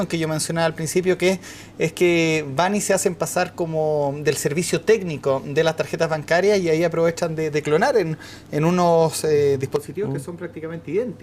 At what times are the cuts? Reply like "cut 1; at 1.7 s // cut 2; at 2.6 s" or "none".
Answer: cut 1; at 6.4 s

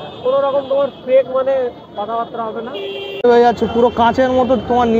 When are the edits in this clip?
cut 1; at 3.2 s

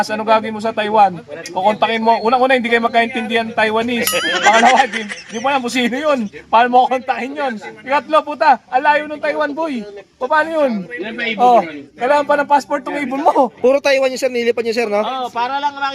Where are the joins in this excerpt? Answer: cut 1; at 13.5 s

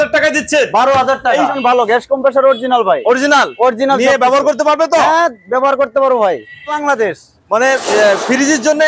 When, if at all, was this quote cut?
cut 1; at 1.6 s // cut 2; at 6.8 s

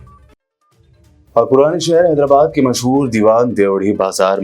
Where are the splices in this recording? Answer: cut 1; at 1.1 s

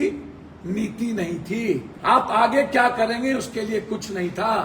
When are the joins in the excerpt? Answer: cut 1; at 1.9 s

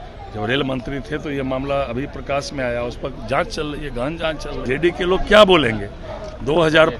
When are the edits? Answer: cut 1; at 4.6 s

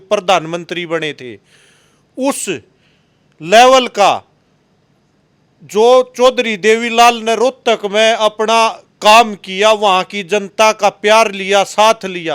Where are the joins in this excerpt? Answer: none

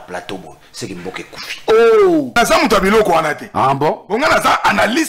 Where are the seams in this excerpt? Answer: cut 1; at 2.4 s

